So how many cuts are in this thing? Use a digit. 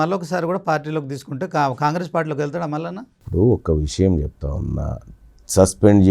0